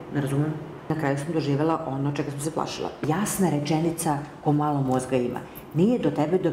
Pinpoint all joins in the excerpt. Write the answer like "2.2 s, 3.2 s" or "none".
0.9 s, 3.0 s